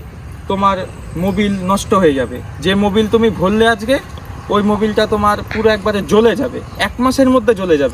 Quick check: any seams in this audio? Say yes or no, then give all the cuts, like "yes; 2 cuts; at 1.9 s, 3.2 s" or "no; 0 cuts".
no; 0 cuts